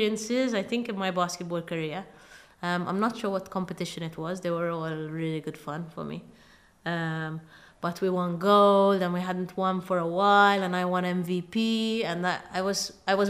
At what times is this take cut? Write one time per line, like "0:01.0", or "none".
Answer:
none